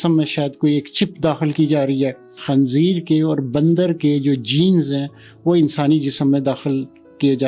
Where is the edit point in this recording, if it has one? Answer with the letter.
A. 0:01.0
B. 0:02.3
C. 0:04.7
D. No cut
B